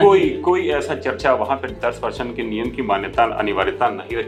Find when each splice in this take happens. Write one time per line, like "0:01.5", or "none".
none